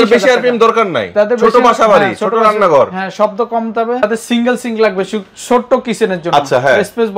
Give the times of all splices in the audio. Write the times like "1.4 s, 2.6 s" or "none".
4.0 s